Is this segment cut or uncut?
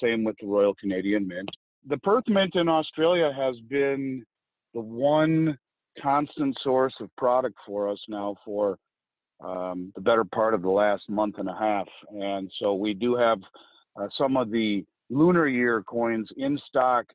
cut